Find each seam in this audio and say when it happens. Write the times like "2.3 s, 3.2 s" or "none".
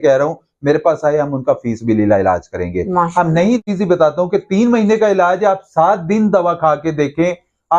3.6 s